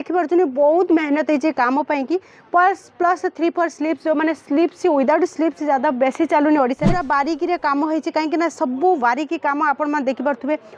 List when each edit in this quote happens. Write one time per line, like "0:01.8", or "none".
0:06.9